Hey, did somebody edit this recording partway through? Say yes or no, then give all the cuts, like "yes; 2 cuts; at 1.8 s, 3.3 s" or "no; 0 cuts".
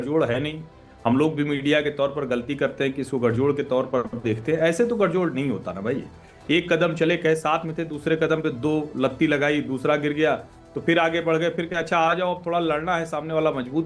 no; 0 cuts